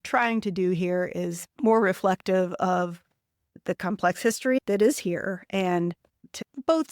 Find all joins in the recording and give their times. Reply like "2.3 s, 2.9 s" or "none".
1.4 s